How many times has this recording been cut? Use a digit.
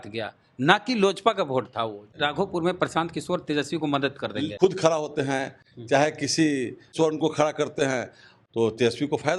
4